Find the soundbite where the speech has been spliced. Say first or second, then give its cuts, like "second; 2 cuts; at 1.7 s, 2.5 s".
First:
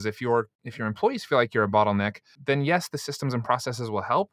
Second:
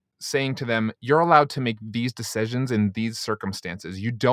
first; 1 cut; at 2.3 s